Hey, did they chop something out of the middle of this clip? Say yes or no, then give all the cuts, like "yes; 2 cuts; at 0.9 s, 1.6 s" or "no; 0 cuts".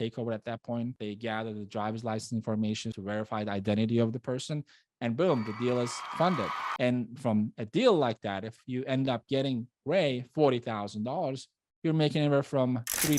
yes; 2 cuts; at 1.0 s, 2.9 s